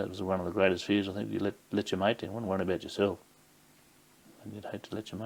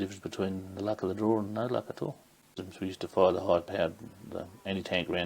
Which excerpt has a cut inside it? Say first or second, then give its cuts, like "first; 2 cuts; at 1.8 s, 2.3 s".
second; 1 cut; at 2.6 s